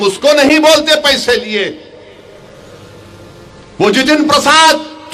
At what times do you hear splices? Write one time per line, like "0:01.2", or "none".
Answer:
none